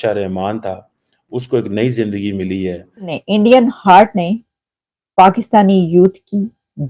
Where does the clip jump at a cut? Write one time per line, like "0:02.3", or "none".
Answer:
0:03.2